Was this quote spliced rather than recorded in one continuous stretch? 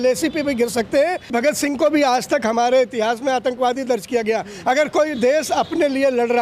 yes; 1 cut; at 1.2 s

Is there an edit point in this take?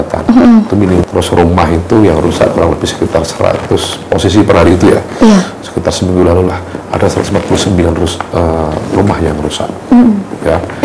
yes; 1 cut; at 1.0 s

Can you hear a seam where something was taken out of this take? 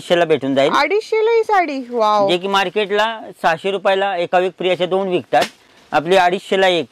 no; 0 cuts

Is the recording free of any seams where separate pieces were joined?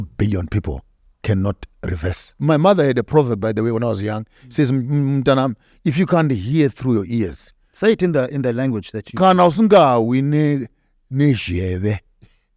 no; 1 cut; at 2.3 s

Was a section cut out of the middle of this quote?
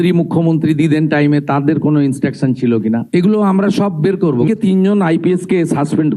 yes; 1 cut; at 4.5 s

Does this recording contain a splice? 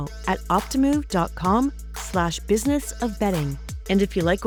no; 0 cuts

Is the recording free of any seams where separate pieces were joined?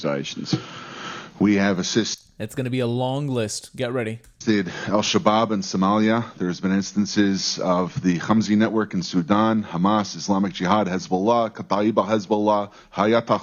yes; 0 cuts

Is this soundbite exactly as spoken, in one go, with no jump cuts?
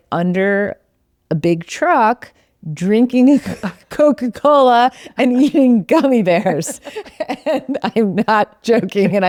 yes; 0 cuts

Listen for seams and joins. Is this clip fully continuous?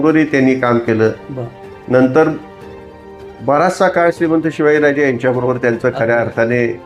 yes; 0 cuts

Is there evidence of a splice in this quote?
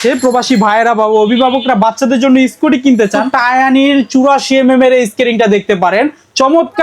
yes; 1 cut; at 3.3 s

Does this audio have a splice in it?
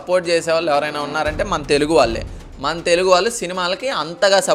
no; 0 cuts

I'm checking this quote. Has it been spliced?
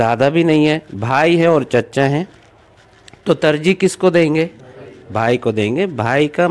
no; 0 cuts

